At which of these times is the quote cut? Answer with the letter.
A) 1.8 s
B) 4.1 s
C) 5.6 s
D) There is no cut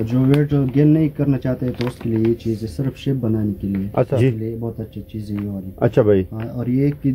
B